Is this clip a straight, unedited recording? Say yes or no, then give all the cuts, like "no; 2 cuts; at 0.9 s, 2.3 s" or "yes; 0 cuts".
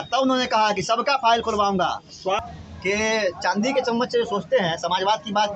no; 1 cut; at 2.4 s